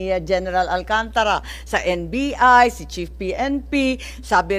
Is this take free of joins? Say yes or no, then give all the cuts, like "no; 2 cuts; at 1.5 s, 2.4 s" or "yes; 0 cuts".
yes; 0 cuts